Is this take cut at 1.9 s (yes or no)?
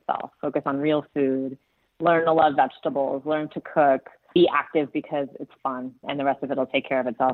no